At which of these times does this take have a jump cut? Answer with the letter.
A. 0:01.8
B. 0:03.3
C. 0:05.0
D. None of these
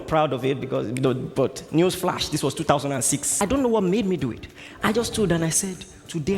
B